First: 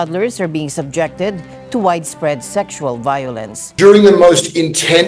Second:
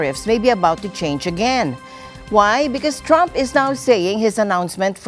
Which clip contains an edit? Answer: first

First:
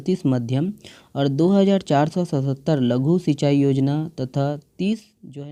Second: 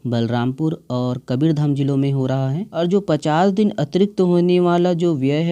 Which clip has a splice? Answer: second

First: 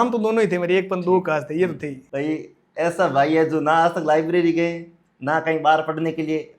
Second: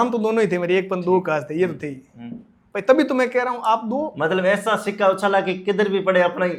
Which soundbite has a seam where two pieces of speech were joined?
first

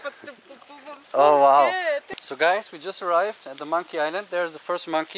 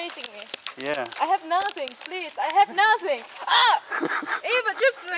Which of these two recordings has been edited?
first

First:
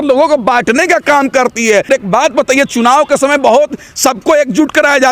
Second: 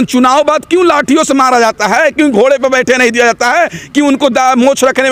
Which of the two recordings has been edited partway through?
first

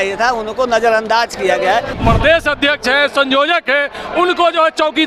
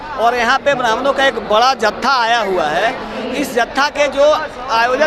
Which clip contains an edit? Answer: first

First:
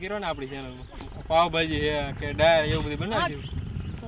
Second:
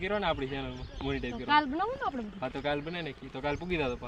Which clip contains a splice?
first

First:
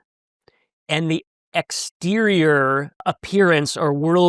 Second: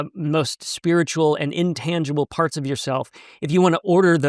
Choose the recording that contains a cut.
first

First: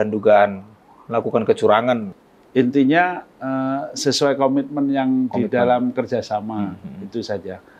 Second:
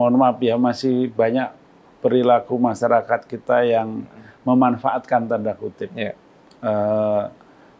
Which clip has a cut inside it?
first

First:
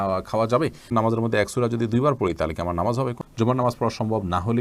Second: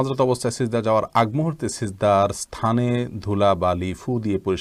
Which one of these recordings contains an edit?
first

